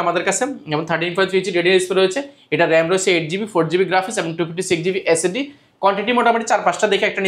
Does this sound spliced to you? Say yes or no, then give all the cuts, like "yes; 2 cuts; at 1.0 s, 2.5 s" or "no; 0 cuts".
no; 0 cuts